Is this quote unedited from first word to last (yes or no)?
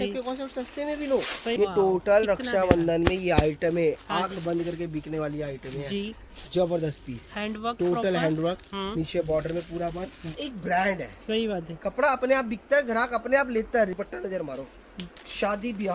no